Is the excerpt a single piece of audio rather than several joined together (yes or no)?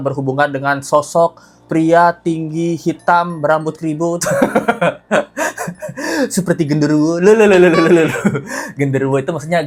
yes